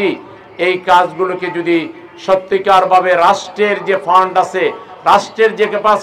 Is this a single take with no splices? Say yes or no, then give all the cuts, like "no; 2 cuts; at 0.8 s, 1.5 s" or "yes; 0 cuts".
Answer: yes; 0 cuts